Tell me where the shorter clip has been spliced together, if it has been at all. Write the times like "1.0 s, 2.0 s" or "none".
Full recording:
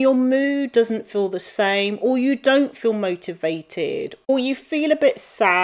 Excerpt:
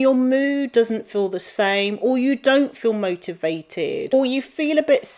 4.1 s